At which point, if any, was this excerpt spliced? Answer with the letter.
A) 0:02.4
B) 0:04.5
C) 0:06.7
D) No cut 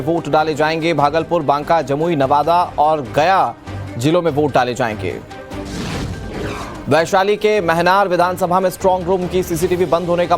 A